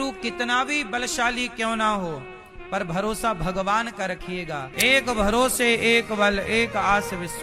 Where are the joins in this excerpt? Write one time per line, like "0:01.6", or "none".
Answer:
0:04.6